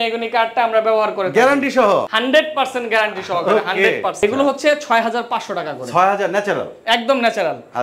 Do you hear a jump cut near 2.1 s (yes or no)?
yes